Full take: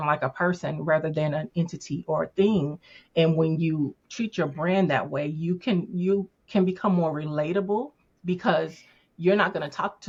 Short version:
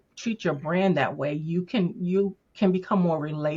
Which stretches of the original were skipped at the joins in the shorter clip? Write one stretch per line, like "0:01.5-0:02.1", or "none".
none